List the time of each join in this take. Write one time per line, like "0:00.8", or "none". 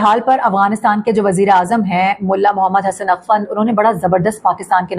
none